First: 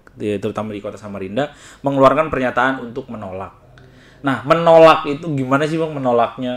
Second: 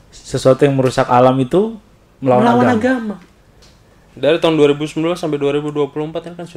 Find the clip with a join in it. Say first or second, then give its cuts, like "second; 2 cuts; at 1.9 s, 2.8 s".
second; 1 cut; at 4.1 s